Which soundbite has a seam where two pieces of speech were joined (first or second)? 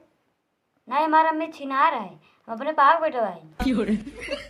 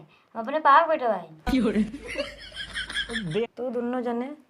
second